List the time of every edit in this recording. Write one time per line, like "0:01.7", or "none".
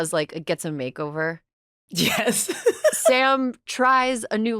0:03.1